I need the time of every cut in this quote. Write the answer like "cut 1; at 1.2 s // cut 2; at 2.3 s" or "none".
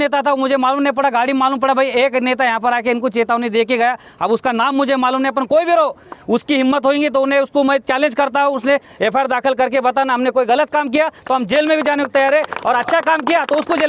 none